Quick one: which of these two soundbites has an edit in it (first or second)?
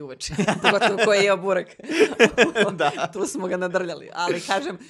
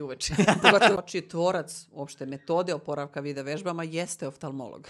second